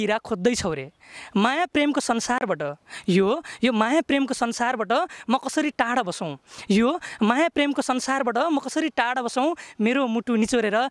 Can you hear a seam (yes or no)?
no